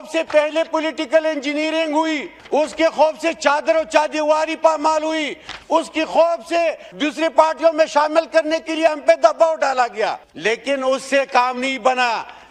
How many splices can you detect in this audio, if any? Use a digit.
3